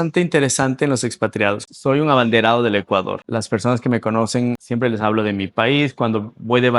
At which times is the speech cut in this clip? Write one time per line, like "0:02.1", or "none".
0:01.6
0:03.2
0:04.6